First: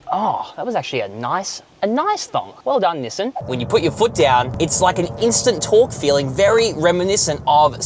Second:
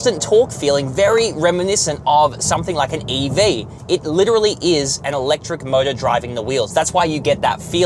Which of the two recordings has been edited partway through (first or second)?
first